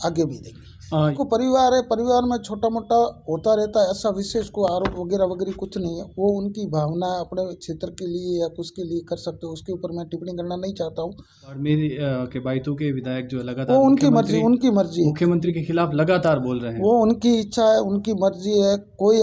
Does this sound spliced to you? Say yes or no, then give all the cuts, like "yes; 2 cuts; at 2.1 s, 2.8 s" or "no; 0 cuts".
yes; 2 cuts; at 1.2 s, 11.6 s